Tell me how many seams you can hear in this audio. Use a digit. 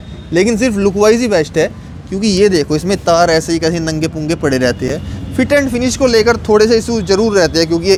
0